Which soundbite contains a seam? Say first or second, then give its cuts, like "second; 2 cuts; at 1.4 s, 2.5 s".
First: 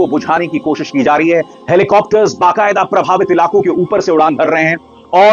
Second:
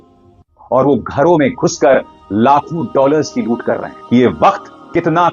second; 1 cut; at 3.9 s